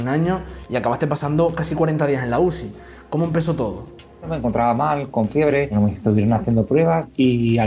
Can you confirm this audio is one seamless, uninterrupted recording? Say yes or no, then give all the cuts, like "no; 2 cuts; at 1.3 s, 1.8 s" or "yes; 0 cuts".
yes; 0 cuts